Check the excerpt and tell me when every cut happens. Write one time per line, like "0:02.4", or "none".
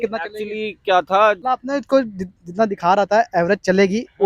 0:01.4